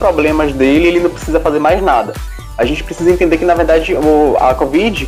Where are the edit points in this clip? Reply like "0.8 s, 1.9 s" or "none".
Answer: none